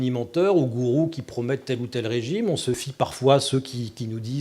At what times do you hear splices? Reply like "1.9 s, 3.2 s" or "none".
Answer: 2.9 s